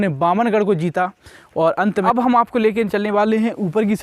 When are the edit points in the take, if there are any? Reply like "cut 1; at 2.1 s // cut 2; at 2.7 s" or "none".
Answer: cut 1; at 2.0 s